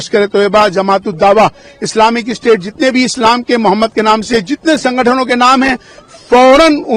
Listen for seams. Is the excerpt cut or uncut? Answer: uncut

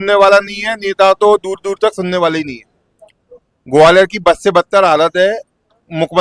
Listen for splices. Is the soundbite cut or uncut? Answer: uncut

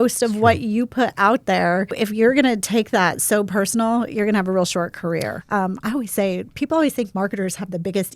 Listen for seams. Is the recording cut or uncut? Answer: cut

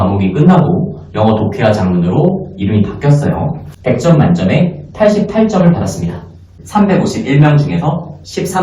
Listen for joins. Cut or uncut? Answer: cut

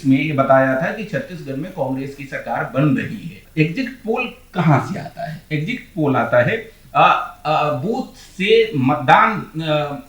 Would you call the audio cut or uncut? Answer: cut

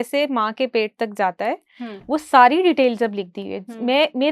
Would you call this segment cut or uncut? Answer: uncut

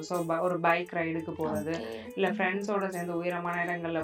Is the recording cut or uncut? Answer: uncut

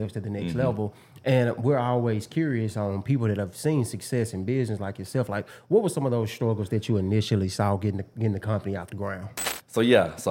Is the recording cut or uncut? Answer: cut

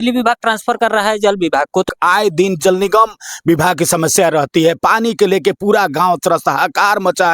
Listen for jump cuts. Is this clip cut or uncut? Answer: cut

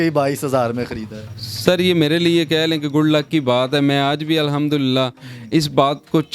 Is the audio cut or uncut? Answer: uncut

